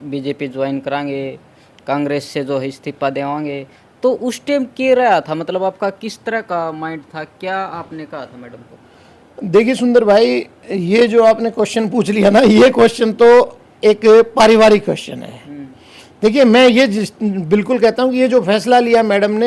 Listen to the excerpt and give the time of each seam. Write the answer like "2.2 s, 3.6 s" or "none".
none